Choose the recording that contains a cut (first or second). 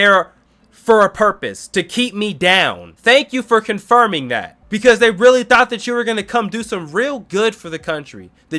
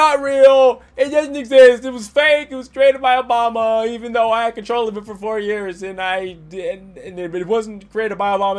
first